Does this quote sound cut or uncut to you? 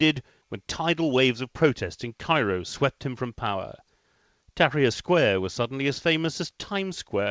cut